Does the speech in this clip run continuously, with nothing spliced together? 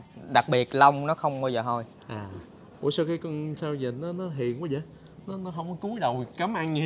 yes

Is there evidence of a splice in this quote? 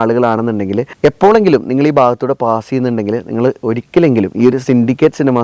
no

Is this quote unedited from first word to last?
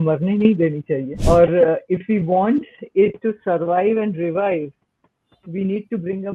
no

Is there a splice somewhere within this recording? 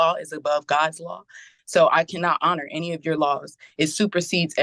no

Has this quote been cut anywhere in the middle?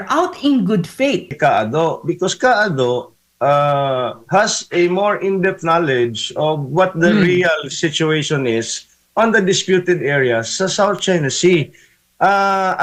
yes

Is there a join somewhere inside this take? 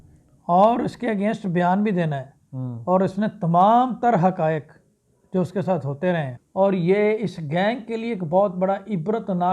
yes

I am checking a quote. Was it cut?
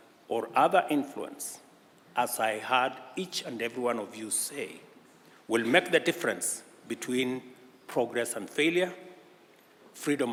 no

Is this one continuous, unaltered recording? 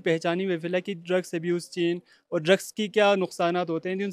yes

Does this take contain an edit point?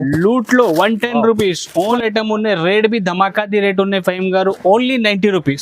yes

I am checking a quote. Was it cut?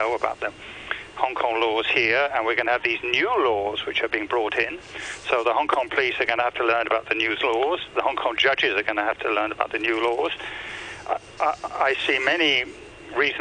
no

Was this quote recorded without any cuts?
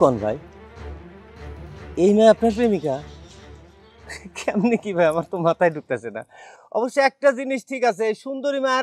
yes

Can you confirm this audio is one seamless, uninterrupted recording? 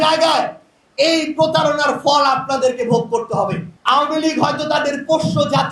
no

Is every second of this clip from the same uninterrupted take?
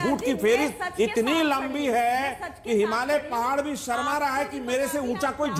yes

